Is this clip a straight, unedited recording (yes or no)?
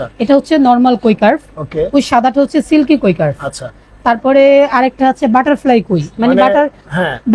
yes